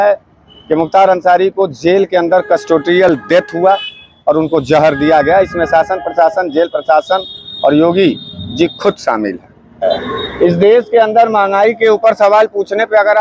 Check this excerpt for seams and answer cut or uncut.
uncut